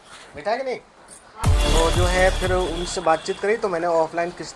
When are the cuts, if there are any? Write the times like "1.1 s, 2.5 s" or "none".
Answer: 1.4 s